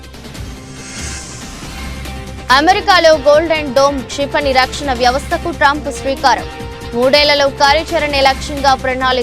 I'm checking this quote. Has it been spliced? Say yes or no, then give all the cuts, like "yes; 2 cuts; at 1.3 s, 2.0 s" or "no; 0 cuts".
yes; 1 cut; at 1.0 s